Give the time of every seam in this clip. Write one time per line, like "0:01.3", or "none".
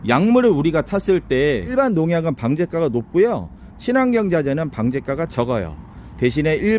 0:01.7